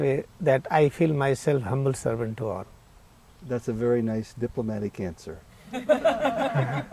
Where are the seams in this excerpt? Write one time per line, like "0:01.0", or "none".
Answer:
none